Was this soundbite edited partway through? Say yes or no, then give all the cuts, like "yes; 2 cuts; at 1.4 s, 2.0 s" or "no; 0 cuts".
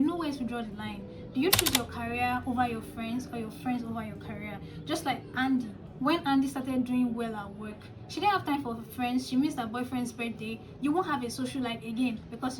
no; 0 cuts